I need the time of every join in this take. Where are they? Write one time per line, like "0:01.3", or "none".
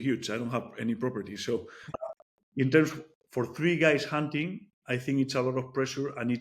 0:02.0